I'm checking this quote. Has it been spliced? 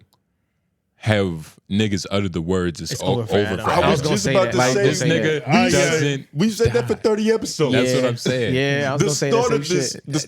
no; 0 cuts

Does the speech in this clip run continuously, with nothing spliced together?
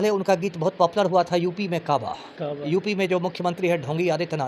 yes; 0 cuts

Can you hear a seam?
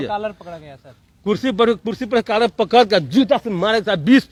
no; 0 cuts

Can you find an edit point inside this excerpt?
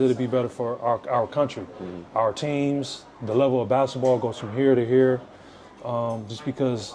no; 0 cuts

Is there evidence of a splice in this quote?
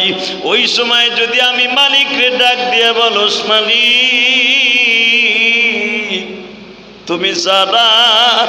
no; 0 cuts

